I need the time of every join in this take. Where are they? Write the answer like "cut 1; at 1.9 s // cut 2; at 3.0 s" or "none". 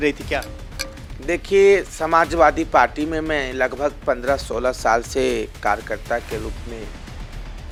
none